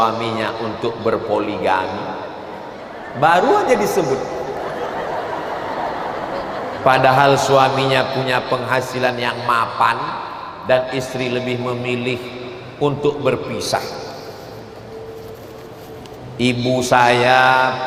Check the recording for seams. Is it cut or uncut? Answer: uncut